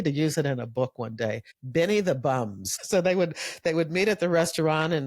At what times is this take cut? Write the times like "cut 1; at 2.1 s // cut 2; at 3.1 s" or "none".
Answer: cut 1; at 1.5 s // cut 2; at 2.8 s